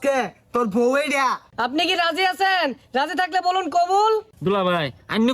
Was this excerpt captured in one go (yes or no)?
no